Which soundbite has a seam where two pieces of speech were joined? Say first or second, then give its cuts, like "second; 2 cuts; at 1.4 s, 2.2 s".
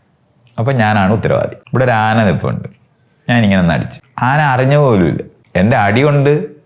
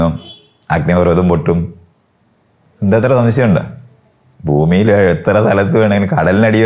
first; 3 cuts; at 1.6 s, 4.0 s, 5.3 s